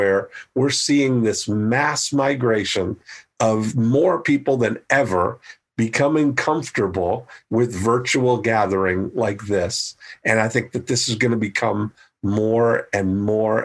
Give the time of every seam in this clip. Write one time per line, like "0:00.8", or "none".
0:03.7